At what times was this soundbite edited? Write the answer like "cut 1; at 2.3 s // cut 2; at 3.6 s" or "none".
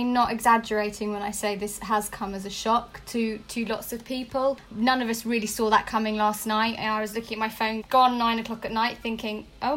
cut 1; at 4.7 s // cut 2; at 7.8 s